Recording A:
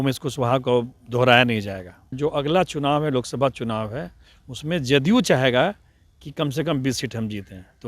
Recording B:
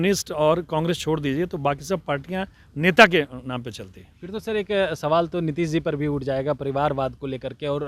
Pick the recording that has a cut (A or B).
A